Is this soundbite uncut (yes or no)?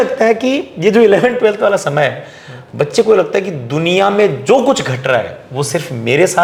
yes